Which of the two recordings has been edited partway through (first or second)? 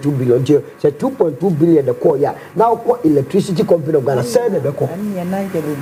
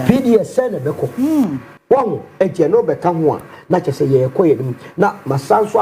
second